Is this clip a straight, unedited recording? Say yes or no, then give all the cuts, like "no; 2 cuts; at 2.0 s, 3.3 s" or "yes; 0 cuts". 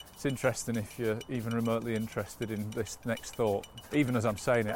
no; 1 cut; at 3.8 s